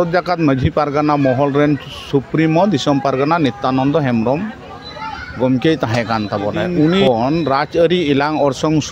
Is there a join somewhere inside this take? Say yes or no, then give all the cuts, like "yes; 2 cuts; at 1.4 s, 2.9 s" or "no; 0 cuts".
yes; 1 cut; at 7.0 s